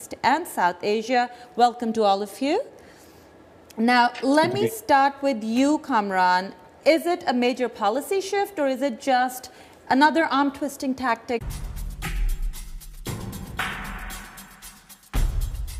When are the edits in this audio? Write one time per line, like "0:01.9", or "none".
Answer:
none